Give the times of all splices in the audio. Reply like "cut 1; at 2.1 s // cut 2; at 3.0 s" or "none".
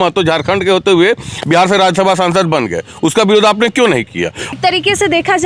cut 1; at 4.5 s